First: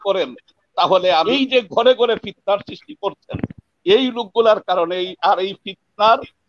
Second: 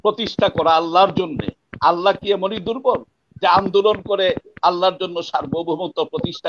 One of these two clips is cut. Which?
first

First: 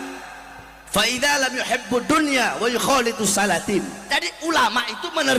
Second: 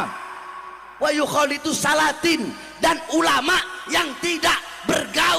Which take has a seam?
first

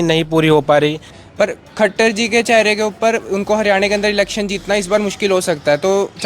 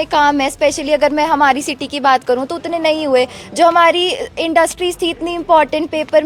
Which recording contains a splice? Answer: first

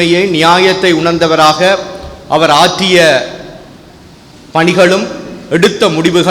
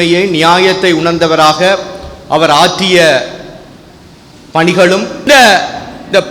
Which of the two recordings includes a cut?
second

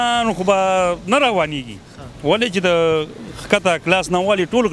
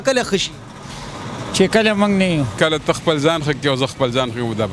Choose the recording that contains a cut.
second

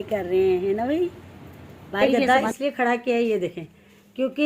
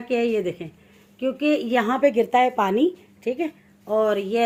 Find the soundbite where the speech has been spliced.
first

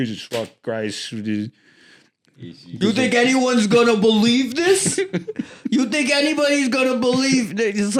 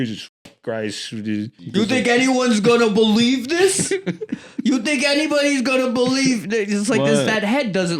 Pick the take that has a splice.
second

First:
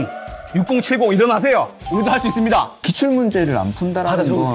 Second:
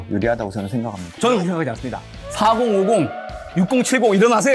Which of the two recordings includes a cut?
first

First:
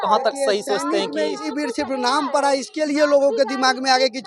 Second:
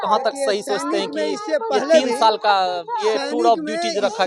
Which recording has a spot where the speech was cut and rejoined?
first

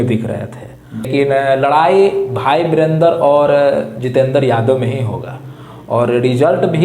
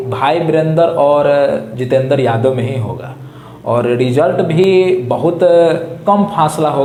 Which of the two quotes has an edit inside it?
first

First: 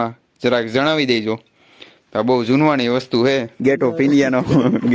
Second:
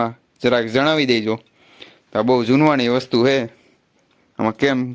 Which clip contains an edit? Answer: first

